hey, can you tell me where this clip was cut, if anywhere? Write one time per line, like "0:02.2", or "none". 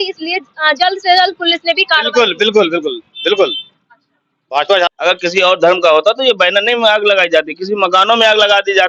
0:04.9